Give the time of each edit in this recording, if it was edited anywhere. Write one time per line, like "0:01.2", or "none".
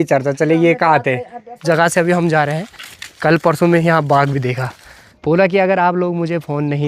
0:01.6
0:05.1